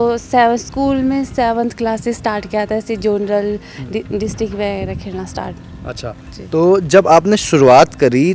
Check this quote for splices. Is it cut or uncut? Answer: uncut